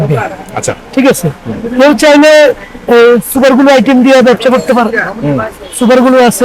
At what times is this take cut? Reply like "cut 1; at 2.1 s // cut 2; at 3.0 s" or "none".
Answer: none